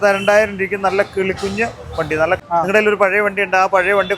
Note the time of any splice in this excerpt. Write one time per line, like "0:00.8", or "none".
0:02.4

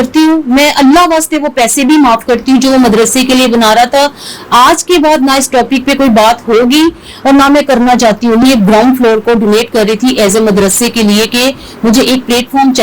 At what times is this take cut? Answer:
0:08.4

